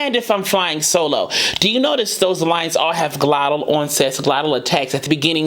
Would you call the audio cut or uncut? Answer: uncut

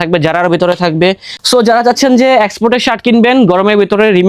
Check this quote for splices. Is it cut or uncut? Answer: cut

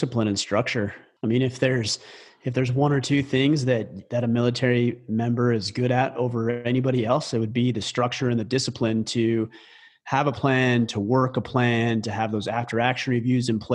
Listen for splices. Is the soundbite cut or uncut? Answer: cut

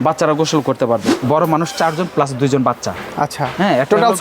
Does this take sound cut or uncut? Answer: cut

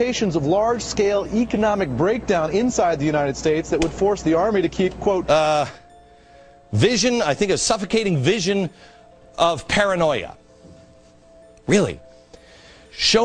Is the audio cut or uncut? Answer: uncut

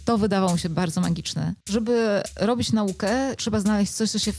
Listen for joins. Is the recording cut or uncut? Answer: cut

